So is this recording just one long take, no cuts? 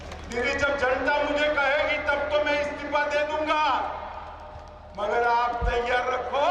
yes; 0 cuts

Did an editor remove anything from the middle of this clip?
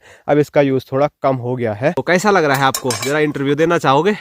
yes; 1 cut; at 2.0 s

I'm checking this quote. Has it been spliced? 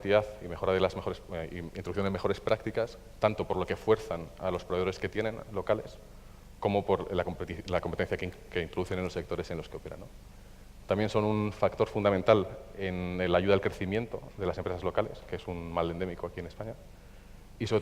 yes; 1 cut; at 6.5 s

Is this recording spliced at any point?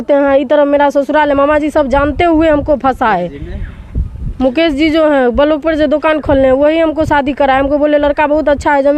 no; 0 cuts

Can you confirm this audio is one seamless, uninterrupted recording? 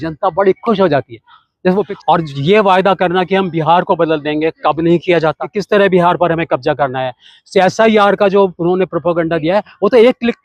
no; 2 cuts; at 1.9 s, 5.5 s

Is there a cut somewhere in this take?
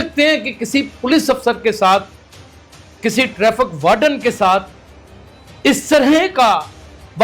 no; 0 cuts

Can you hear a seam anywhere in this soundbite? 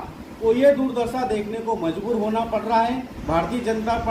yes; 1 cut; at 3.1 s

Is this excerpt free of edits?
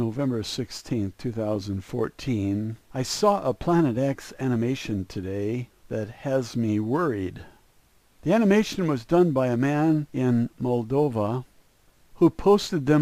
yes; 0 cuts

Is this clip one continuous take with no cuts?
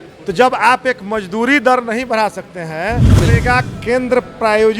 no; 1 cut; at 3.2 s

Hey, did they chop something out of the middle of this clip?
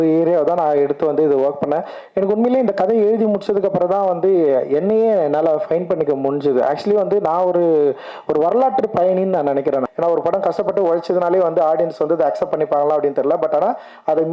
yes; 1 cut; at 9.9 s

